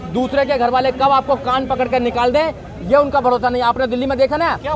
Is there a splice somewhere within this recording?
no; 0 cuts

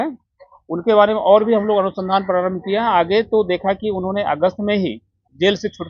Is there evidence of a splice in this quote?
no; 0 cuts

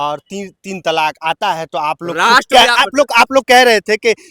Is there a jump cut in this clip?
no; 0 cuts

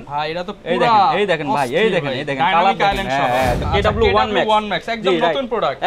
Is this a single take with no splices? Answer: no; 1 cut; at 3.6 s

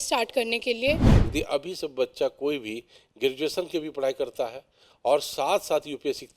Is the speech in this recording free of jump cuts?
no; 1 cut; at 1.1 s

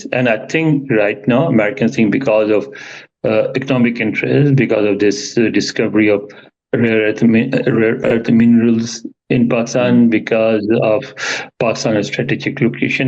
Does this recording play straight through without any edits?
yes; 0 cuts

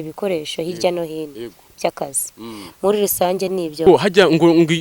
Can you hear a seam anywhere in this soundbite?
yes; 1 cut; at 3.8 s

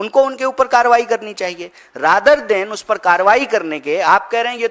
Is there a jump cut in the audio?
no; 0 cuts

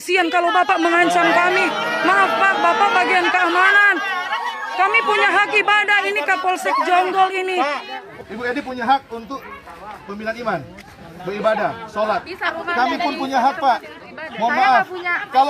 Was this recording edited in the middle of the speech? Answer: yes; 1 cut; at 8.1 s

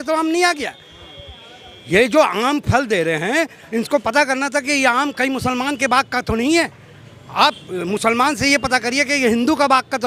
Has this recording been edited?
no; 0 cuts

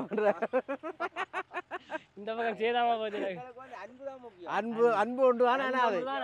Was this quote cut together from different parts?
no; 0 cuts

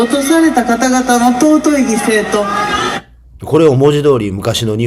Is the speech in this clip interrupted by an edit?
yes; 1 cut; at 2.9 s

